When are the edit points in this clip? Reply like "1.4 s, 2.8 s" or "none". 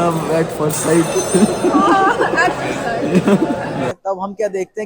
3.9 s